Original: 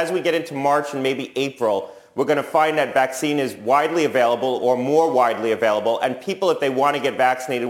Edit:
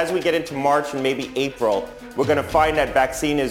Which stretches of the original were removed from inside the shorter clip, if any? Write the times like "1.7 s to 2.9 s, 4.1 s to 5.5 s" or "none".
none